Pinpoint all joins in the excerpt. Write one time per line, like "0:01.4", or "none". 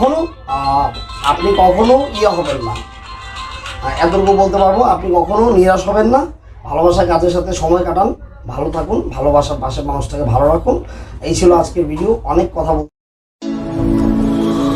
0:12.8